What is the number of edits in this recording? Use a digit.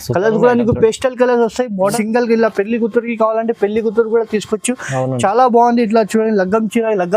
1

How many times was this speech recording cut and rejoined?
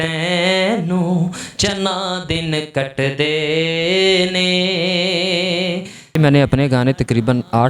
1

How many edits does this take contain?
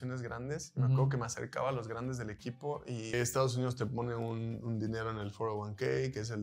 1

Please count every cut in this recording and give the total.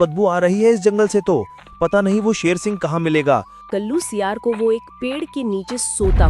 1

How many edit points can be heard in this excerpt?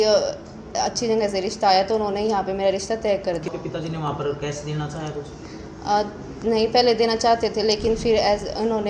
1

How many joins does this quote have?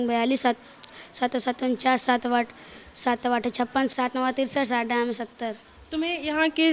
1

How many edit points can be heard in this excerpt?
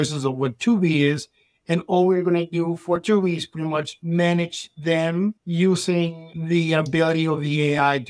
3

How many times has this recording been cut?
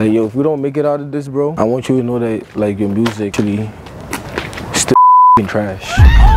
1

